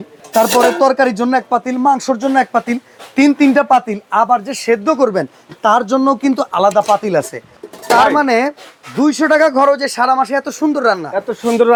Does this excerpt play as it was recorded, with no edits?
yes; 0 cuts

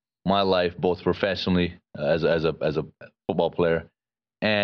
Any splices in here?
no; 0 cuts

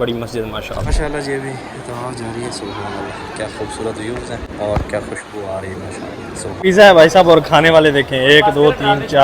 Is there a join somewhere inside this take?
yes; 3 cuts; at 0.9 s, 4.5 s, 6.5 s

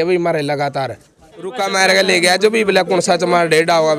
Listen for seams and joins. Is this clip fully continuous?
no; 1 cut; at 1.6 s

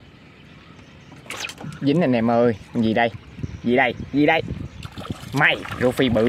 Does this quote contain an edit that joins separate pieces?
no; 0 cuts

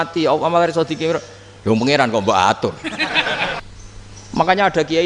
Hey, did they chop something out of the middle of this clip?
yes; 1 cut; at 3.6 s

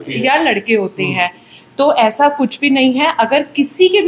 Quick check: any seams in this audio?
no; 0 cuts

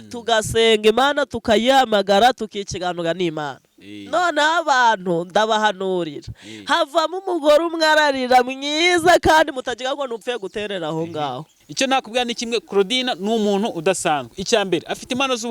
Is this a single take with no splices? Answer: no; 1 cut; at 11.6 s

